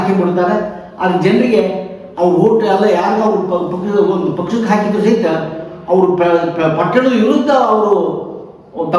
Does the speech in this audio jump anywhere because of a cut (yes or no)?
no